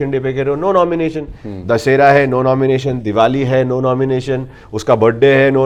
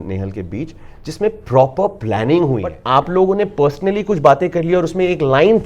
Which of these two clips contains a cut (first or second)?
second